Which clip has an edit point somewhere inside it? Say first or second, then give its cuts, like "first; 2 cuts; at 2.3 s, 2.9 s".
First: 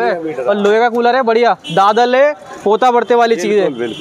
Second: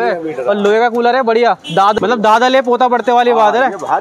second; 1 cut; at 2.0 s